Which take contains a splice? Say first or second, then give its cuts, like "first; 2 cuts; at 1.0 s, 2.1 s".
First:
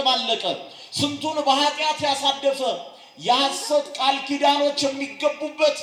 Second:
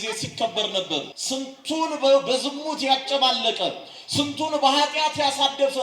second; 1 cut; at 1.2 s